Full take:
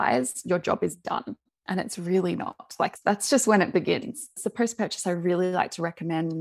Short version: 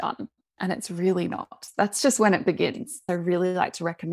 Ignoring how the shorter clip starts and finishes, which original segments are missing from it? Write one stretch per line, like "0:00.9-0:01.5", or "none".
0:02.7-0:02.9
0:04.3-0:05.0